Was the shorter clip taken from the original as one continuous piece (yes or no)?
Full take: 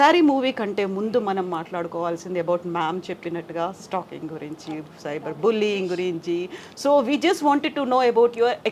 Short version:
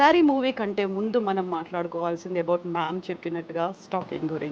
yes